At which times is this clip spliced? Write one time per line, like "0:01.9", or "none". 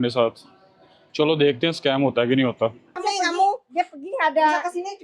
0:02.9